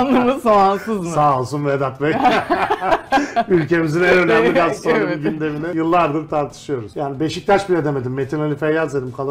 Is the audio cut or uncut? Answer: cut